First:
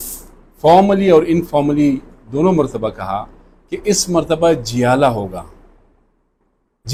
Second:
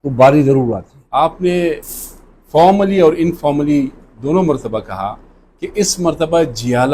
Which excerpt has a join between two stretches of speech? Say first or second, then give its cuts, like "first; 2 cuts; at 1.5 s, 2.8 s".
second; 1 cut; at 0.9 s